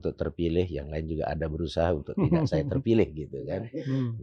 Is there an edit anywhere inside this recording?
no; 0 cuts

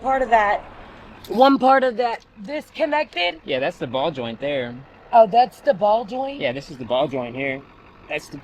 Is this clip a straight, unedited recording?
yes; 0 cuts

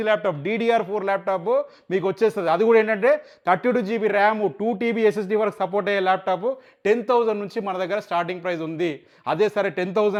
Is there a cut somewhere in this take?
no; 0 cuts

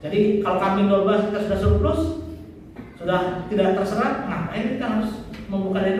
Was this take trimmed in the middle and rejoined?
no; 0 cuts

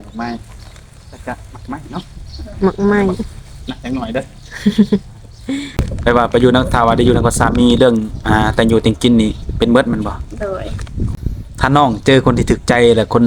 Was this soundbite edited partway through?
yes; 2 cuts; at 5.8 s, 11.2 s

